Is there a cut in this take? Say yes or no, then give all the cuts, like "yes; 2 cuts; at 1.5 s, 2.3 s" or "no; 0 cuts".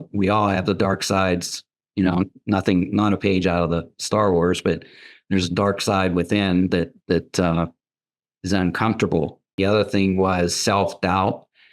yes; 1 cut; at 9.6 s